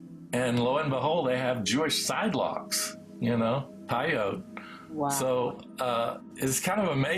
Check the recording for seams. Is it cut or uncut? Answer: cut